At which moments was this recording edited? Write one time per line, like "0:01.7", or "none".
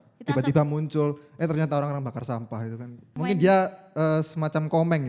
0:03.1